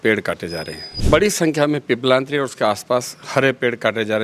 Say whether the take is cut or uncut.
cut